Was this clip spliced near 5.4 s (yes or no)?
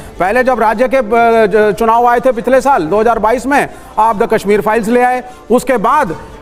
no